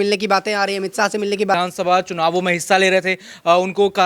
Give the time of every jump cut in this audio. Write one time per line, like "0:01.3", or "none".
0:01.5